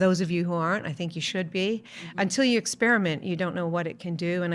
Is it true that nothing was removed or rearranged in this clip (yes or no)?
yes